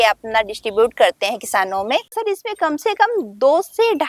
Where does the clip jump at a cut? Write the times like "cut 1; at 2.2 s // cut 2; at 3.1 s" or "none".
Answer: cut 1; at 2.1 s